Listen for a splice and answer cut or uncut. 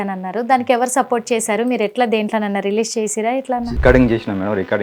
uncut